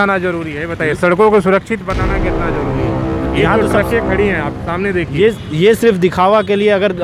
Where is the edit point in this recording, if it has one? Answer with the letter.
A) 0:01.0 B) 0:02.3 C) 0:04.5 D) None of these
D